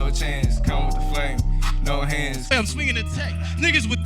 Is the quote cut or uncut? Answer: cut